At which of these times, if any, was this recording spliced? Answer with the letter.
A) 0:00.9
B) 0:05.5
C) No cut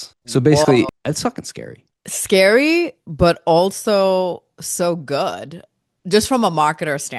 A